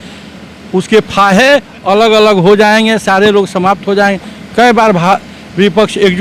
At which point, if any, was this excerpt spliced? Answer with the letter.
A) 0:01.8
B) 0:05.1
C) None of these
C